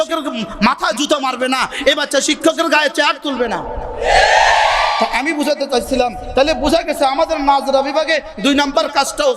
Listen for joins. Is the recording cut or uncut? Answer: uncut